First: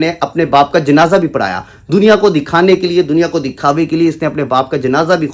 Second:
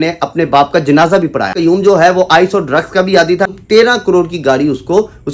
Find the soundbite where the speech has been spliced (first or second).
second